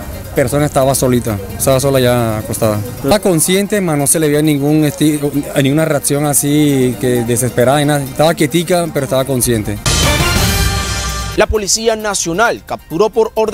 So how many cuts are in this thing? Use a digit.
2